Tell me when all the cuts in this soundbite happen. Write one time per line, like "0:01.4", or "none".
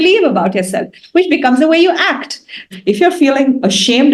0:02.7